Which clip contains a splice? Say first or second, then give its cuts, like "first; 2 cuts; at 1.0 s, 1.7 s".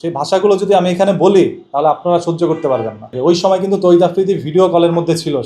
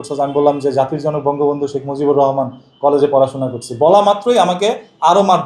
first; 1 cut; at 3.1 s